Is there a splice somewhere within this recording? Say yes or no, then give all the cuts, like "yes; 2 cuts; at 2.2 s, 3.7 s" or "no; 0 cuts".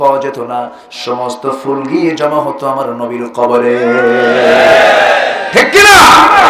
no; 0 cuts